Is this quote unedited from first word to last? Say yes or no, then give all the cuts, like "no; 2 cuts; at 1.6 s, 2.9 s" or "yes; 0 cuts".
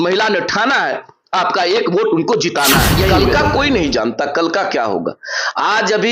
no; 1 cut; at 3.1 s